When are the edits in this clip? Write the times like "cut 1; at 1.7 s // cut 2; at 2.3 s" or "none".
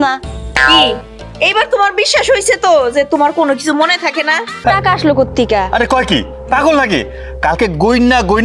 cut 1; at 4.6 s